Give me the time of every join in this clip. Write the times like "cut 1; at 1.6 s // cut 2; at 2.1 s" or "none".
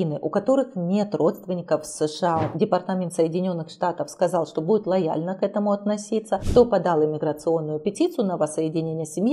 cut 1; at 2.5 s // cut 2; at 6.4 s